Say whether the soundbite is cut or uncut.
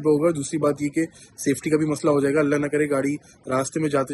uncut